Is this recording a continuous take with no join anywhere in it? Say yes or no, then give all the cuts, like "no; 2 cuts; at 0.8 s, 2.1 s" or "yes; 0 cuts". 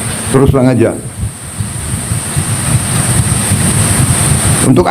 yes; 0 cuts